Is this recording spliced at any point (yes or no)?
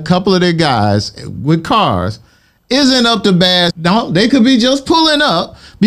yes